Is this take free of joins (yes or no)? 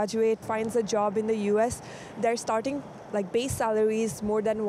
yes